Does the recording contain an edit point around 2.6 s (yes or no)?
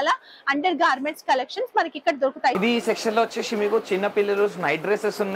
yes